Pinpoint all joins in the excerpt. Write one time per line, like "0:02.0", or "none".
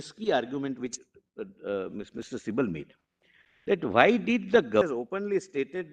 0:04.8